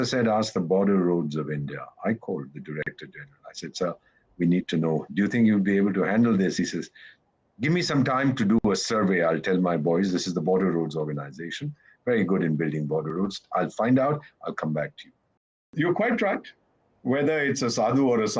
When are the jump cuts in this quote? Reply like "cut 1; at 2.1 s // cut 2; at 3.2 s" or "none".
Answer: cut 1; at 15.7 s